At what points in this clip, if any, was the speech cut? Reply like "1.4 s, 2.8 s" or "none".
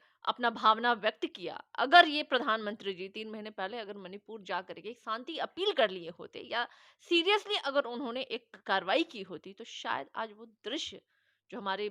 none